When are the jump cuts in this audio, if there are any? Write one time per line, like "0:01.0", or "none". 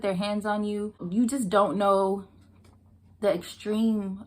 0:01.0